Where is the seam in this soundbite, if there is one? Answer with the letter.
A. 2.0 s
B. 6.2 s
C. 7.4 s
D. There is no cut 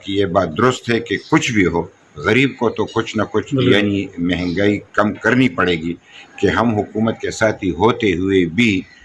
B